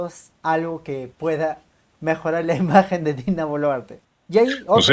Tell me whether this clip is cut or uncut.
cut